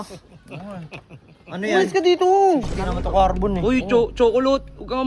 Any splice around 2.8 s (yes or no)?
yes